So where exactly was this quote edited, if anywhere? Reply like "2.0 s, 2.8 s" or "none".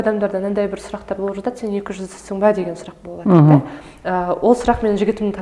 none